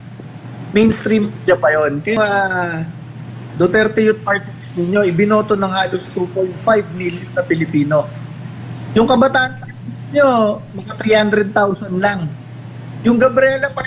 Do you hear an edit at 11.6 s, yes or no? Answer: no